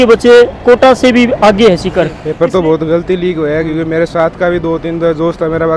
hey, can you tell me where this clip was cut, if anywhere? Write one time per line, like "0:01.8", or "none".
0:02.2